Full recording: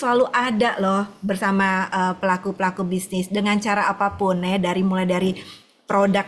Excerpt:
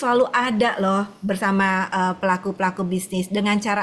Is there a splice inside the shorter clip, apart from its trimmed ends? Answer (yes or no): no